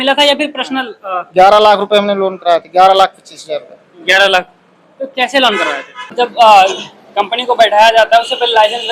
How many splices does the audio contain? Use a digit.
1